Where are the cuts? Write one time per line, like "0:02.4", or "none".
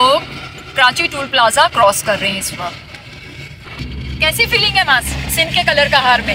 0:03.7